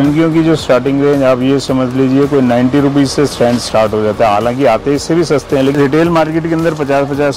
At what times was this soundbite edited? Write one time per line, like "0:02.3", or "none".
0:05.7